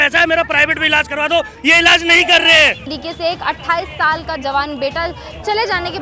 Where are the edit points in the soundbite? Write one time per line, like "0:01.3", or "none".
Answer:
0:02.9